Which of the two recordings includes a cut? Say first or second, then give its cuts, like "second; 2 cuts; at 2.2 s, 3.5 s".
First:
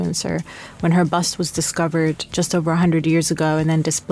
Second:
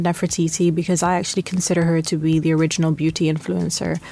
first; 1 cut; at 2.3 s